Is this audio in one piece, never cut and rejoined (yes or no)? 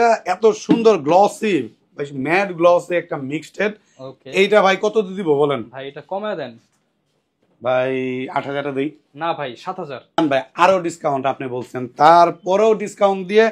yes